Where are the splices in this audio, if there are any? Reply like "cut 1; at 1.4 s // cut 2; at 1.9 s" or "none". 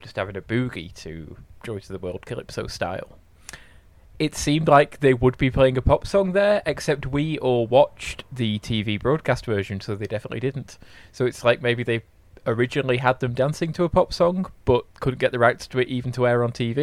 none